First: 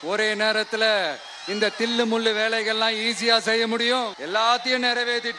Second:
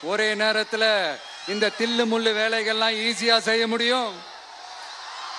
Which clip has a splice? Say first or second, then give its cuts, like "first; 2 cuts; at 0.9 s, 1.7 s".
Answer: first; 1 cut; at 4.2 s